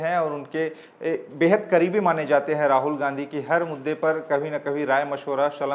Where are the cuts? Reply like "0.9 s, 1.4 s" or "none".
none